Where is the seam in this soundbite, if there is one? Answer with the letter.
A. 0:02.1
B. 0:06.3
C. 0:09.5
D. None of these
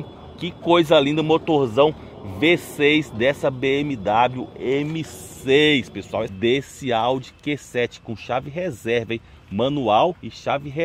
B